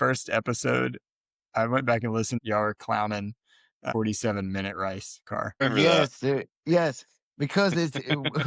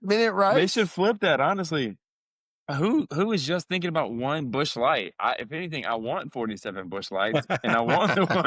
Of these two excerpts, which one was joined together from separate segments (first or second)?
first